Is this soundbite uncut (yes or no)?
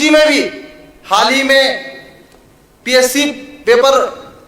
yes